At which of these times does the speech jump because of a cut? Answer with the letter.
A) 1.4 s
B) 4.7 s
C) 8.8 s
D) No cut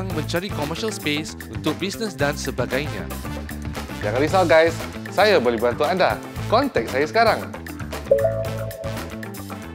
C